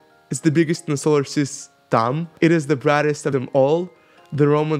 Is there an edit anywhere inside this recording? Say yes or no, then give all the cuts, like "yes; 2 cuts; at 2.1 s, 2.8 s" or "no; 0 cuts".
yes; 1 cut; at 2.3 s